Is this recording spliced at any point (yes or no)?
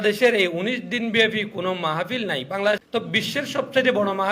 yes